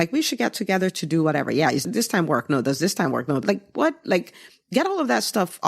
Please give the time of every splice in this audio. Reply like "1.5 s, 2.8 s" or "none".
1.8 s, 3.4 s